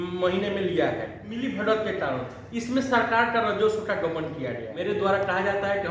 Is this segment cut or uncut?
cut